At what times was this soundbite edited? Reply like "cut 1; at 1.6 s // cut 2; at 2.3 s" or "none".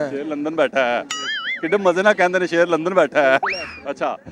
none